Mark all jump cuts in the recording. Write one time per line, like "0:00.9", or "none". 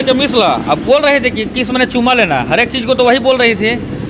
none